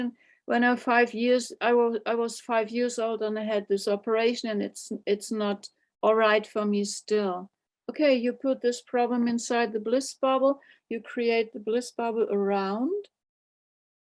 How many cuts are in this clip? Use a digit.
0